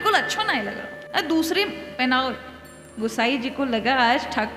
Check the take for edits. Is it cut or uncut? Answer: uncut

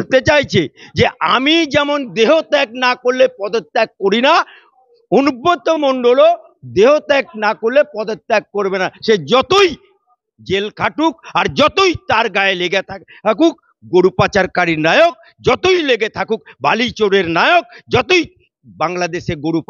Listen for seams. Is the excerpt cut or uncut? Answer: uncut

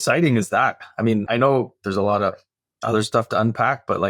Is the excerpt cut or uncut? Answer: cut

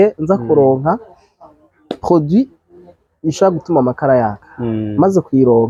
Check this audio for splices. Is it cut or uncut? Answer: uncut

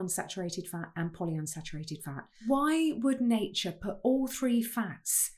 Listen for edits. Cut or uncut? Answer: cut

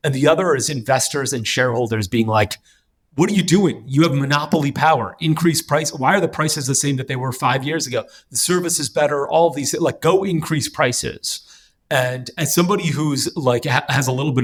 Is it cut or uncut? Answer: uncut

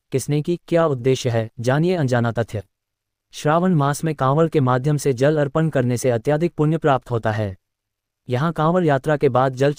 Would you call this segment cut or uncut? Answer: uncut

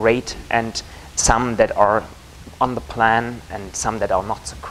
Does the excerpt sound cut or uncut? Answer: cut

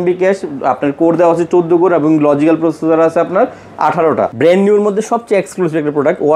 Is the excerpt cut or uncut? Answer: cut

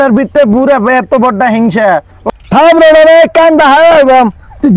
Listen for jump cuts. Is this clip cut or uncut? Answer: cut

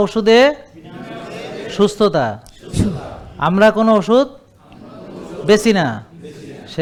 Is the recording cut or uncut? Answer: uncut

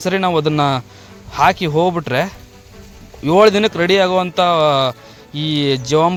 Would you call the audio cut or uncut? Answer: uncut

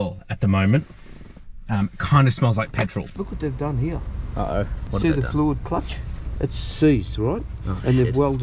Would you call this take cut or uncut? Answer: cut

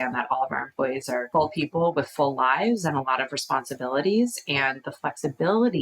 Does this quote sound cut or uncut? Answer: cut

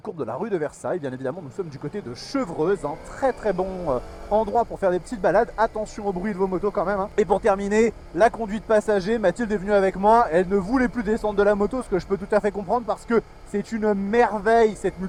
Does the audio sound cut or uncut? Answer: uncut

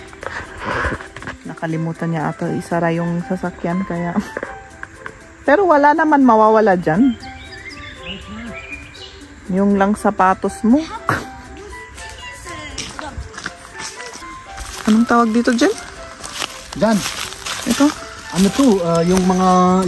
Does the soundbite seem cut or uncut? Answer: cut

